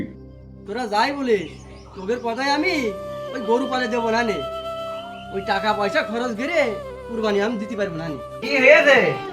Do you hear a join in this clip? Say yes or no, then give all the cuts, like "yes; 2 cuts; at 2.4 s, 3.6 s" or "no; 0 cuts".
yes; 1 cut; at 8.4 s